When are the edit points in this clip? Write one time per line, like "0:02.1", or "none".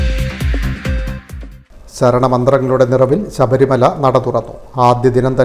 none